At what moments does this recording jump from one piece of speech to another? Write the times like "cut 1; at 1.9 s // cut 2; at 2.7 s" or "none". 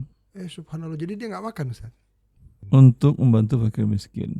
cut 1; at 2.5 s